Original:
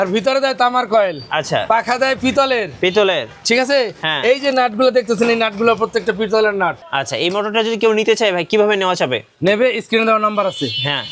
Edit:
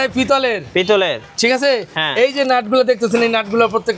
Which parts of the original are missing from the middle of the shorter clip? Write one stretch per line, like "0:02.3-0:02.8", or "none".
none